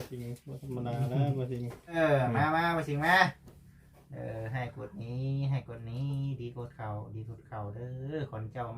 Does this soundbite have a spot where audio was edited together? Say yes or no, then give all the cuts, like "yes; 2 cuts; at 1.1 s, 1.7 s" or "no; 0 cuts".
yes; 1 cut; at 1.9 s